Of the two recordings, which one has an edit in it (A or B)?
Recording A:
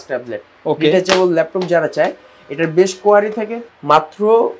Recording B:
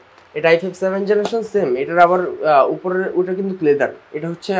A